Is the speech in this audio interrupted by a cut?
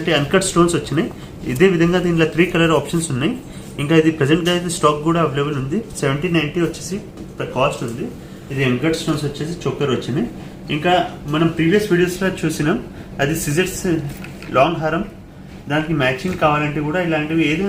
no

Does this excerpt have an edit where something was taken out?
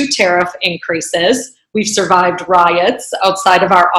no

